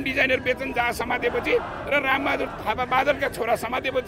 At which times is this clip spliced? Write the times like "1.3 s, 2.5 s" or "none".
none